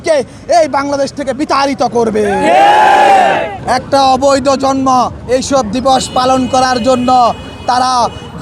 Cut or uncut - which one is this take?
cut